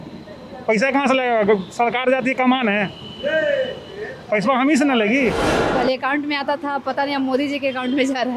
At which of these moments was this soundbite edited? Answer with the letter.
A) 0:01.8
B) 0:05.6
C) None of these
B